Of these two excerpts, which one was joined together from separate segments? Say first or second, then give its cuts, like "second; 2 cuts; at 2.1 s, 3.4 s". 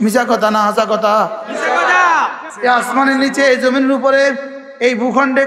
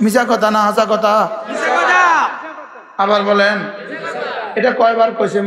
first; 1 cut; at 2.5 s